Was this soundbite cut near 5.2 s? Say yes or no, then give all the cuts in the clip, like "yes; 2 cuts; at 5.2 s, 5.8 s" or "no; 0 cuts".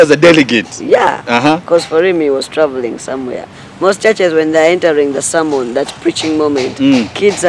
no; 1 cut; at 3.6 s